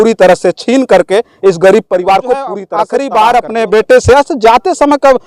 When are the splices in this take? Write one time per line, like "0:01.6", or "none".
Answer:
0:02.7

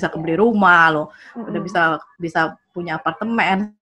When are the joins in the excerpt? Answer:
none

